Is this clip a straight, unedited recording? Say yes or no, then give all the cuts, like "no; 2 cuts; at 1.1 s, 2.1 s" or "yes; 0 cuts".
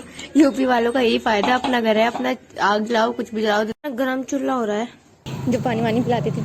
no; 1 cut; at 5.3 s